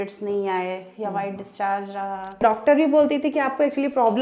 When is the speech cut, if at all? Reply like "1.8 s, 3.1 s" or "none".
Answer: 2.4 s